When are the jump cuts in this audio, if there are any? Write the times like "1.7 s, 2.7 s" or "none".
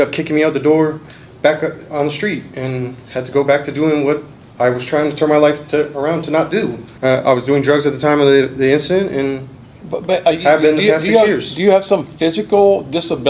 6.8 s